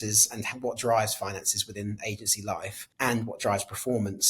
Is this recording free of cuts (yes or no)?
no